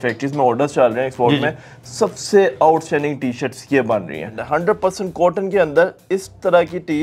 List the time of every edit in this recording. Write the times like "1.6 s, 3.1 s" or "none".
4.4 s